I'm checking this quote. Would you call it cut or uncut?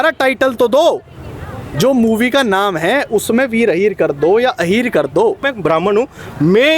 cut